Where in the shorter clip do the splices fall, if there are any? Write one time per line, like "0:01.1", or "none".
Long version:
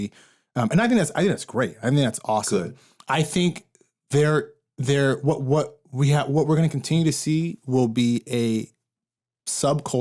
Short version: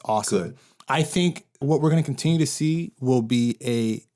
0:01.6